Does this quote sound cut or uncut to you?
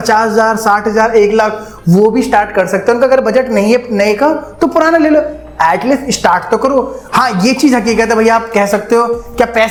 uncut